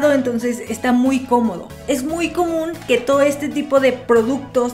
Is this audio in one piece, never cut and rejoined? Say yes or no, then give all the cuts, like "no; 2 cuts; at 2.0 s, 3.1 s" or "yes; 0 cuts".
no; 1 cut; at 1.7 s